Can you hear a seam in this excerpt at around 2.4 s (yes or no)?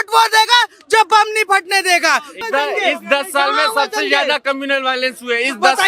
yes